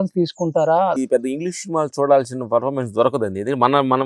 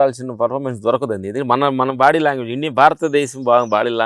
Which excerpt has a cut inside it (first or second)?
first